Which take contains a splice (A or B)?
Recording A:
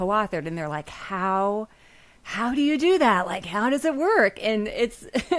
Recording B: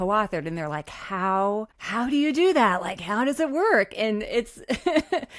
B